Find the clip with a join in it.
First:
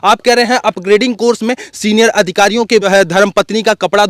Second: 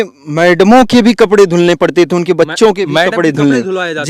first; 1 cut; at 2.9 s

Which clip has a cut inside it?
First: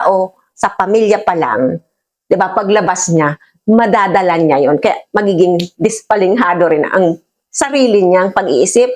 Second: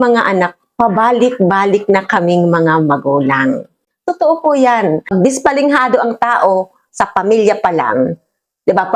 second; 1 cut; at 5.1 s

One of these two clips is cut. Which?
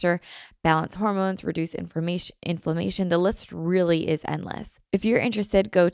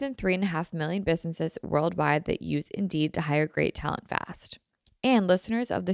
first; 1 cut; at 4.7 s

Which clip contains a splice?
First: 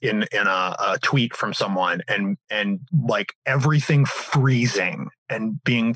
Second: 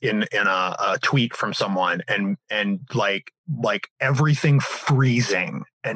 first; 1 cut; at 2.8 s

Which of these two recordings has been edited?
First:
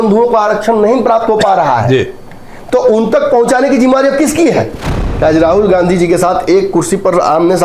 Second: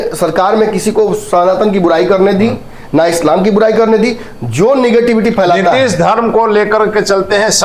first; 1 cut; at 5.1 s

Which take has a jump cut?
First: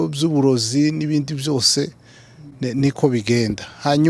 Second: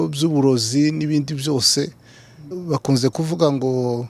second; 1 cut; at 2.4 s

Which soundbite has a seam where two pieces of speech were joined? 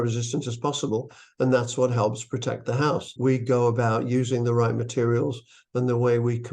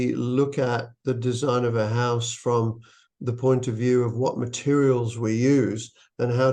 first; 1 cut; at 3.1 s

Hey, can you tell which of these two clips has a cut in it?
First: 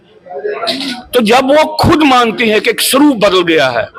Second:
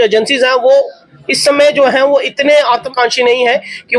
second; 1 cut; at 2.9 s

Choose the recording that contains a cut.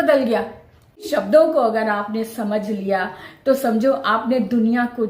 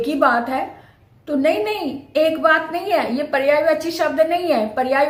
first; 1 cut; at 1.0 s

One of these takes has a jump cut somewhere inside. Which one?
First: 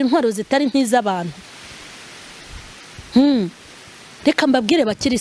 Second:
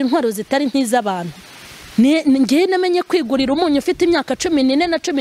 second; 1 cut; at 1.8 s

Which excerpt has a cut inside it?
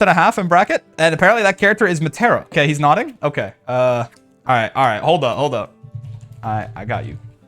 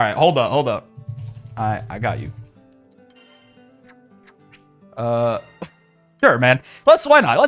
first; 1 cut; at 2.5 s

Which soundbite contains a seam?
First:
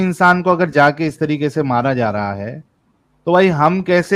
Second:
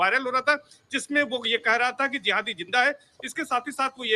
second; 1 cut; at 3.0 s

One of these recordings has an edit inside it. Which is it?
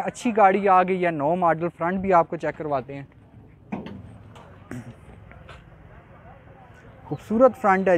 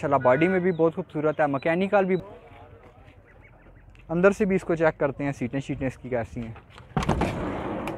second; 1 cut; at 2.2 s

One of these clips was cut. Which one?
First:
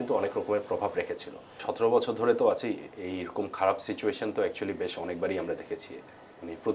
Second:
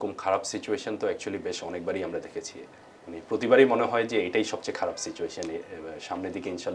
first; 1 cut; at 1.6 s

